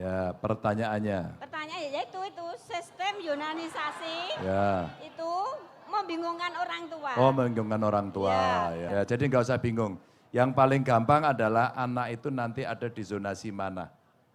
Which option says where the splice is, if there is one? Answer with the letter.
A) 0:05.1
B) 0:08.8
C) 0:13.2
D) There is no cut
B